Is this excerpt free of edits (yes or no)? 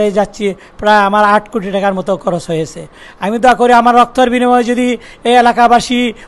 yes